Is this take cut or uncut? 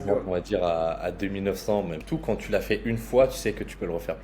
cut